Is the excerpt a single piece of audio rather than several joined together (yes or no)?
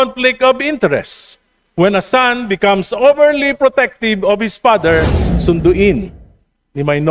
no